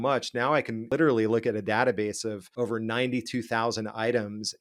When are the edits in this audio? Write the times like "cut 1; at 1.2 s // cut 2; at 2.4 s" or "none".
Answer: cut 1; at 0.9 s // cut 2; at 2.4 s